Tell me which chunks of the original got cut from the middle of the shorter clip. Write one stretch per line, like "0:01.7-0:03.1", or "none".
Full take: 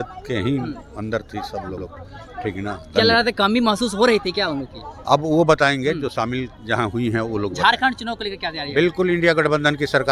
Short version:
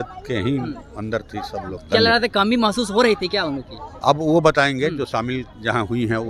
0:01.8-0:02.8

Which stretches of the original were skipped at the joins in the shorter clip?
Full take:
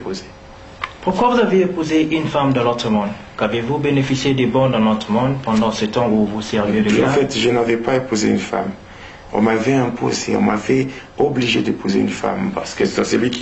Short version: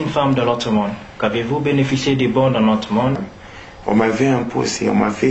0:05.4-0:08.7

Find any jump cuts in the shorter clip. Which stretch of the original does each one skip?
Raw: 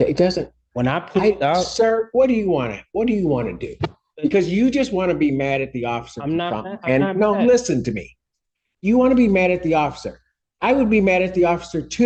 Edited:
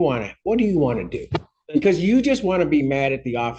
none

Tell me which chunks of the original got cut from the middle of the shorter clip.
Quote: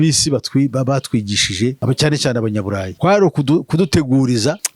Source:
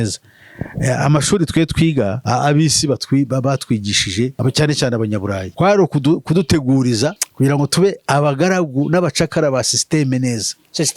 none

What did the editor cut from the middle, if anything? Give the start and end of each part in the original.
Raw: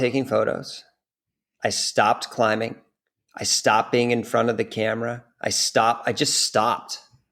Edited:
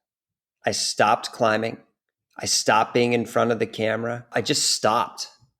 0:05.3-0:06.0

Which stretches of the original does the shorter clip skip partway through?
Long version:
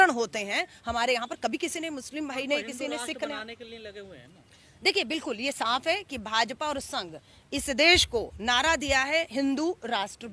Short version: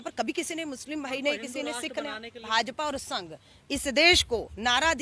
0:03.7-0:06.3

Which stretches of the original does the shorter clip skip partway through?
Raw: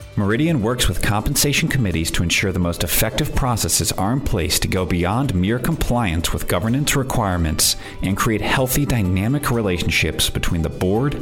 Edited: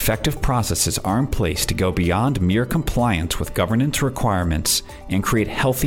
none

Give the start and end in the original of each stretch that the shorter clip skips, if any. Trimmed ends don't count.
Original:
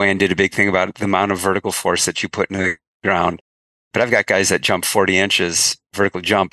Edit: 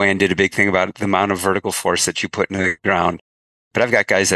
0:02.8-0:03.0

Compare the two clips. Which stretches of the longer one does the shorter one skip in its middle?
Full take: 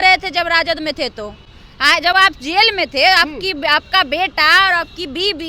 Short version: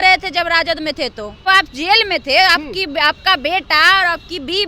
0:01.5-0:02.1

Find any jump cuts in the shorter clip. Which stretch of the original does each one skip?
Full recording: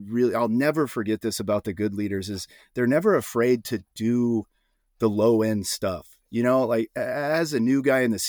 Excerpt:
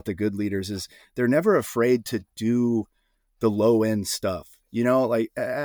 none

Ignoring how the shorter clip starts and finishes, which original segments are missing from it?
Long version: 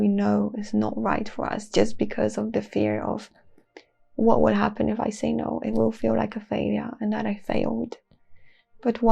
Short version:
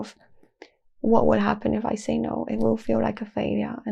none

